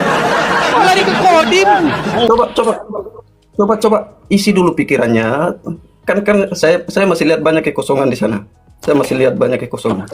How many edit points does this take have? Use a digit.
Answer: 1